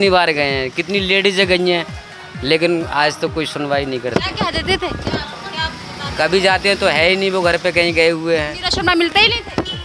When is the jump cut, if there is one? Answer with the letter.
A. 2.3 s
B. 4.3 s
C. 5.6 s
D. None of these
D